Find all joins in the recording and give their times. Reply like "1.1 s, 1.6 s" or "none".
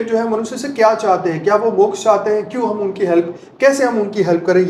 none